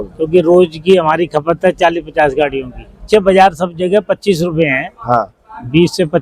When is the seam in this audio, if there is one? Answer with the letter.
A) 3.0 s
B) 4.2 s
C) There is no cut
A